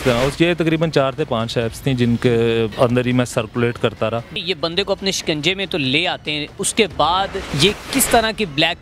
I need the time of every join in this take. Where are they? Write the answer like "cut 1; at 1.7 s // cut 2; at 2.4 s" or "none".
cut 1; at 2.7 s // cut 2; at 4.4 s // cut 3; at 7.4 s